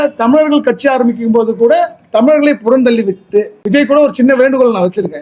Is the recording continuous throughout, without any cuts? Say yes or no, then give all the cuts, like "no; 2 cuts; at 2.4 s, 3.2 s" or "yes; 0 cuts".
no; 1 cut; at 3.6 s